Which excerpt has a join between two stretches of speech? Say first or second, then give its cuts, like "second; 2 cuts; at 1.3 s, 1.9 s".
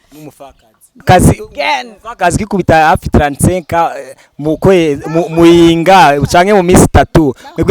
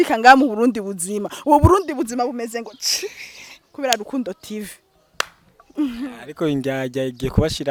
first; 1 cut; at 1.0 s